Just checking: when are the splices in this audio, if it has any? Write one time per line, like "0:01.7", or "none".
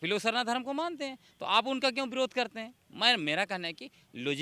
none